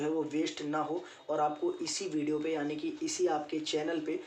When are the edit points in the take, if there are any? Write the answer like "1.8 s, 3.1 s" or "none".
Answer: 1.4 s